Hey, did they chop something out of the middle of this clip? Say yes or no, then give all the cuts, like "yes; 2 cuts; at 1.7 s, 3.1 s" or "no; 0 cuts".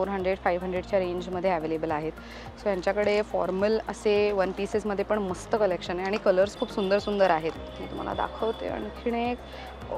no; 0 cuts